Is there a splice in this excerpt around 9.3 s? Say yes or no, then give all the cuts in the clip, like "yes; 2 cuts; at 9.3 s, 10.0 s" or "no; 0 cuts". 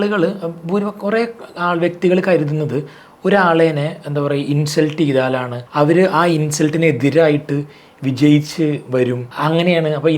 yes; 2 cuts; at 5.6 s, 9.3 s